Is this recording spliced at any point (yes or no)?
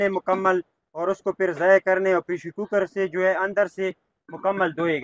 no